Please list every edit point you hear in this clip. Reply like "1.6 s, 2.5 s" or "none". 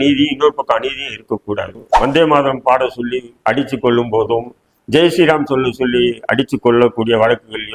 1.8 s